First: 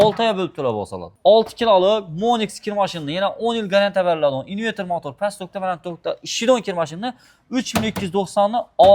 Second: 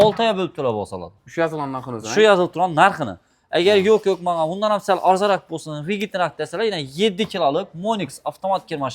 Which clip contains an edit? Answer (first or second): first